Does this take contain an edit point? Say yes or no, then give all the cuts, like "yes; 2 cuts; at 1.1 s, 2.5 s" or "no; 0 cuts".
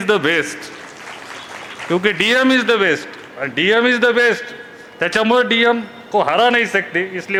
no; 0 cuts